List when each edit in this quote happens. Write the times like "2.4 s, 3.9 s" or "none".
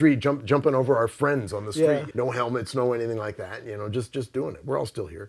2.1 s